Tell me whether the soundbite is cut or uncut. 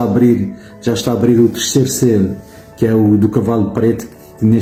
uncut